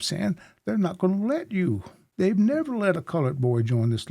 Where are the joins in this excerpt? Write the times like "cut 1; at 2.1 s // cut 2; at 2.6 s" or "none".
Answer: cut 1; at 2.0 s